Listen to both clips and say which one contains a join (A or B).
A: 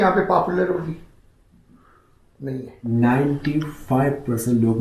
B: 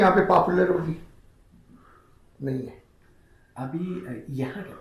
A